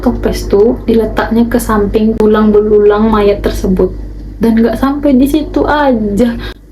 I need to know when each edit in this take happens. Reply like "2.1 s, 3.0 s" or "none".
none